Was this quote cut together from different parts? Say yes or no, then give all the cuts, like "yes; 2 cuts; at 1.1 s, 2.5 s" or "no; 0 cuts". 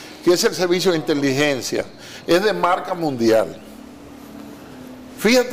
no; 0 cuts